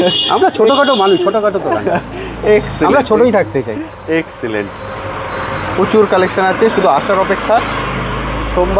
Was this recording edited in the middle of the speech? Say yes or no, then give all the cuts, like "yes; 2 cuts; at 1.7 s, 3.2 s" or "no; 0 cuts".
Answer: no; 0 cuts